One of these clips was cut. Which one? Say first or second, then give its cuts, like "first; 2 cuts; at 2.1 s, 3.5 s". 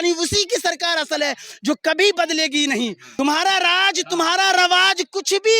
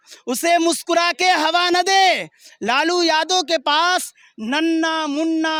first; 1 cut; at 3.0 s